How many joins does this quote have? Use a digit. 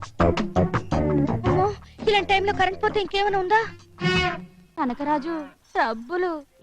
1